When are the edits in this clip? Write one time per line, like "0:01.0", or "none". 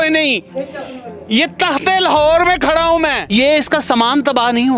0:03.2